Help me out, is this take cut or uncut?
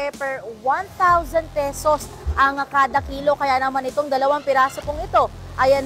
uncut